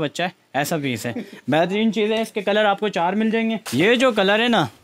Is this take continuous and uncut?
no; 1 cut; at 3.6 s

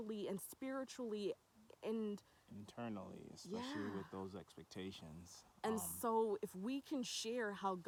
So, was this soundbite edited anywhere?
no; 0 cuts

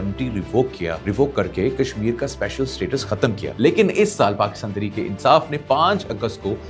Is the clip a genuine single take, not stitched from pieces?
no; 2 cuts; at 1.0 s, 3.5 s

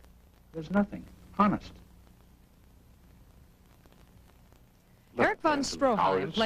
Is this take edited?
yes; 1 cut; at 1.4 s

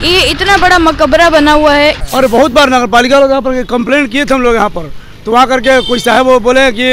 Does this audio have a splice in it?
yes; 1 cut; at 2.0 s

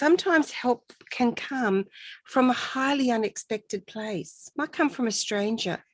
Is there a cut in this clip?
yes; 1 cut; at 4.4 s

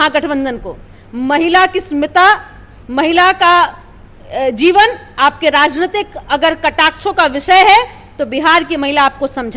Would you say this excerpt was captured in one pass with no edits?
yes; 0 cuts

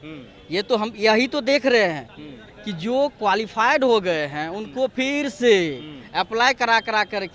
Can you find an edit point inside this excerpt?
no; 0 cuts

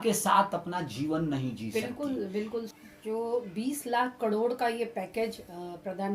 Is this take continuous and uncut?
no; 1 cut; at 2.7 s

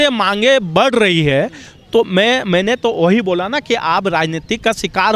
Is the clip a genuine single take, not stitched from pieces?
yes; 0 cuts

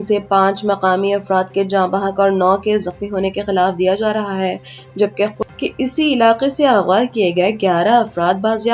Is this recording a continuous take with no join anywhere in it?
no; 1 cut; at 5.4 s

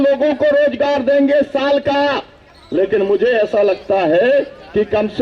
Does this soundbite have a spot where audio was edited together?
no; 0 cuts

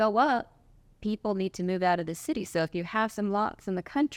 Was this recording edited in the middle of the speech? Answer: no; 0 cuts

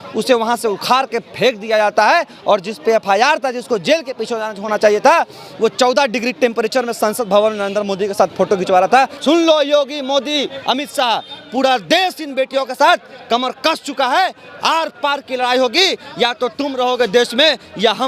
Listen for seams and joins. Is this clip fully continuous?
no; 1 cut; at 9.1 s

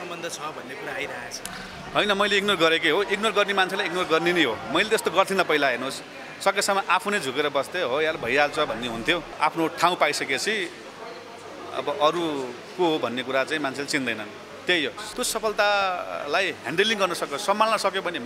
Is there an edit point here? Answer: yes; 3 cuts; at 1.5 s, 9.3 s, 15.0 s

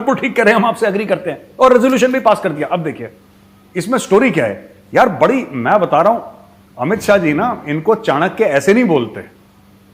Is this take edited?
no; 0 cuts

